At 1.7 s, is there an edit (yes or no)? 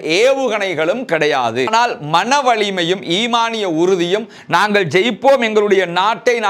yes